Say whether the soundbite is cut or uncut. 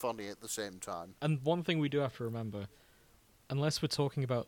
cut